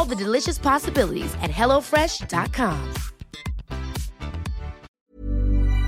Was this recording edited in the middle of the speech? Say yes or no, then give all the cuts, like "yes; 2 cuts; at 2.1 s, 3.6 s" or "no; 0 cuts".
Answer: yes; 1 cut; at 4.9 s